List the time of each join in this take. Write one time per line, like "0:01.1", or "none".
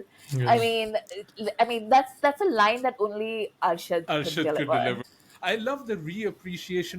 0:05.0